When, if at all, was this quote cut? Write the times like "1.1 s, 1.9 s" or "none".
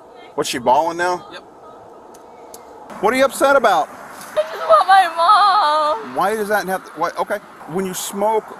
2.9 s, 4.4 s, 7.5 s

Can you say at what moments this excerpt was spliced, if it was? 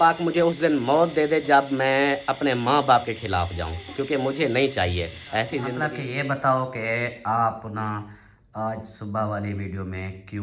5.8 s

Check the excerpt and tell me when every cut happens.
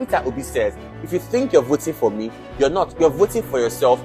0.9 s

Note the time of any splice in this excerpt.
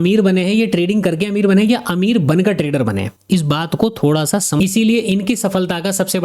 4.6 s

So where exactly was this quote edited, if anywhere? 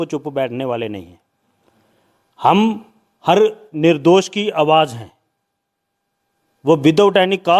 none

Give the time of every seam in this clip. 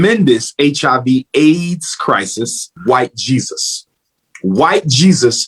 2.7 s

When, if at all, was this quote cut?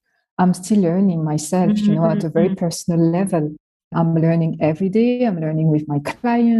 3.9 s

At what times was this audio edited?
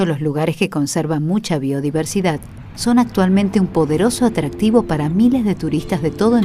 3.0 s

